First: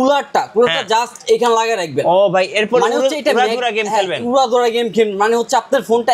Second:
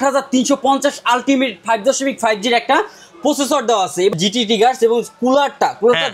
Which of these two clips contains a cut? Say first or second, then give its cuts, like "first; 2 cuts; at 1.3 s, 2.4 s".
second; 1 cut; at 4.1 s